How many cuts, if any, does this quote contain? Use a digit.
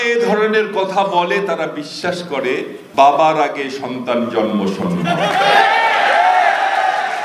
1